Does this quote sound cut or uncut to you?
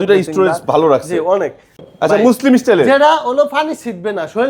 cut